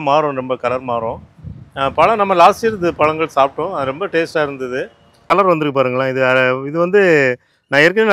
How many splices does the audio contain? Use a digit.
1